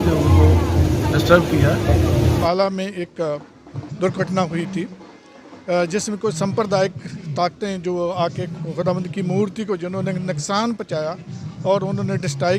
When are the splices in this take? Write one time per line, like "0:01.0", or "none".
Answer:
0:02.4